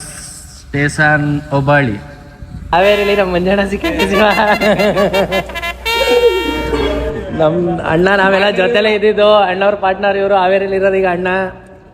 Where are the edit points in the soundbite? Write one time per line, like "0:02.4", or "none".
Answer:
0:02.7